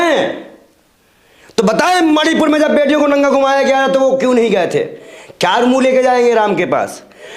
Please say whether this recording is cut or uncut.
uncut